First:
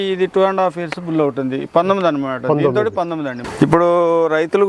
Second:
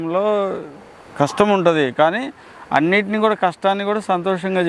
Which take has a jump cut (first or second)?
first